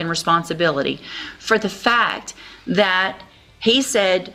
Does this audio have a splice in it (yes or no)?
no